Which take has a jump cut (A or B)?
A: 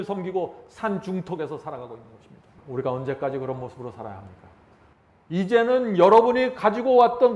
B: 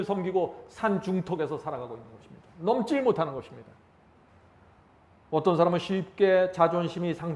A